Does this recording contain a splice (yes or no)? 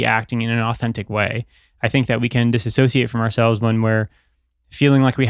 no